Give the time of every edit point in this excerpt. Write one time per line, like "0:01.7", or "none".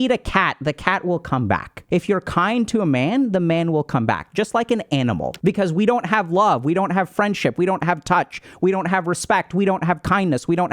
0:01.7
0:05.3